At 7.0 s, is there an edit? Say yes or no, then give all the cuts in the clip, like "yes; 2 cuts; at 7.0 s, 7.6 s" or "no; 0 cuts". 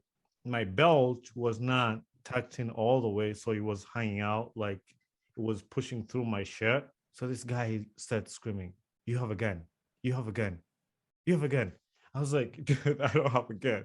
yes; 1 cut; at 7.0 s